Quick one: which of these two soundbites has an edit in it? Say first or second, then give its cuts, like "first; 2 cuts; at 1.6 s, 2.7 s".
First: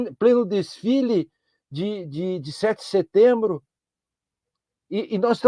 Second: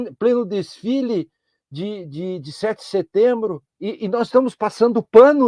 second; 1 cut; at 3.7 s